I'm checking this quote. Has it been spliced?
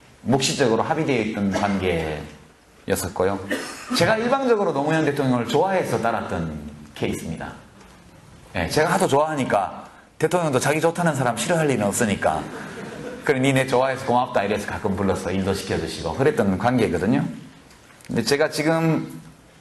no; 0 cuts

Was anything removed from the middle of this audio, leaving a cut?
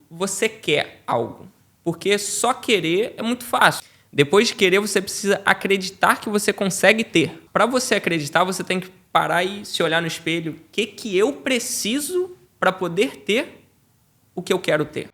yes; 2 cuts; at 3.9 s, 7.4 s

